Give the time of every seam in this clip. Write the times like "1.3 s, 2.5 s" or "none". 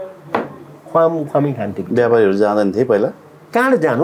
none